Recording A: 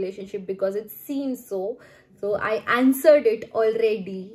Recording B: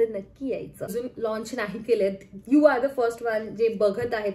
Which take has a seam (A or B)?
B